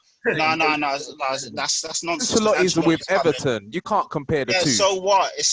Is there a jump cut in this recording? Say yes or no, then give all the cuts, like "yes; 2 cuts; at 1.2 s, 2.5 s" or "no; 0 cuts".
no; 0 cuts